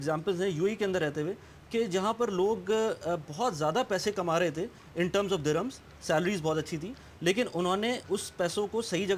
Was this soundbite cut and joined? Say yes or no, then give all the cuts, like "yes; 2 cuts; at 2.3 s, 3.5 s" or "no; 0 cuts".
no; 0 cuts